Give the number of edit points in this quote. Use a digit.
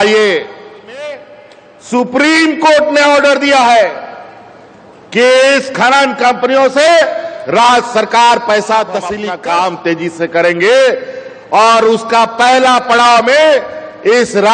2